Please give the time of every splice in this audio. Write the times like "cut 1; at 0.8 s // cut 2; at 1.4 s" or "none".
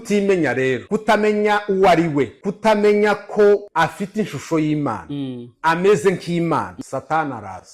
cut 1; at 0.8 s // cut 2; at 2.4 s // cut 3; at 3.7 s // cut 4; at 6.7 s